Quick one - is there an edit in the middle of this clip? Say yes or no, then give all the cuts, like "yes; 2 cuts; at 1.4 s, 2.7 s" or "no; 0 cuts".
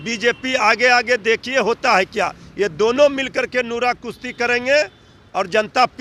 no; 0 cuts